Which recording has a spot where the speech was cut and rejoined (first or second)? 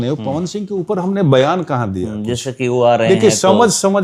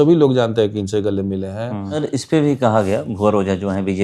second